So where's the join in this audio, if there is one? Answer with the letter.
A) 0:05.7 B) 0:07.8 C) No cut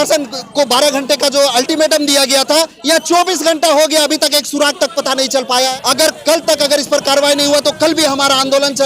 A